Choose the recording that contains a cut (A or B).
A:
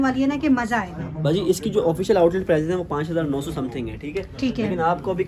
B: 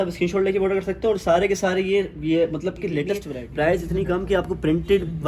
B